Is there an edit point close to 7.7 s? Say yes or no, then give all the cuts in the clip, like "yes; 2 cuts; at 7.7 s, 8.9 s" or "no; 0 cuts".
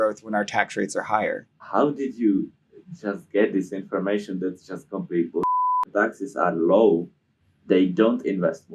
no; 2 cuts; at 1.5 s, 5.9 s